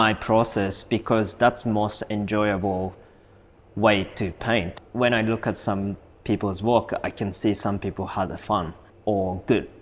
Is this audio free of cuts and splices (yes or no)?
no